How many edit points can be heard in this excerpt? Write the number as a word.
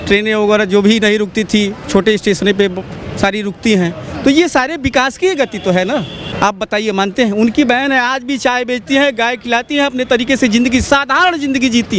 one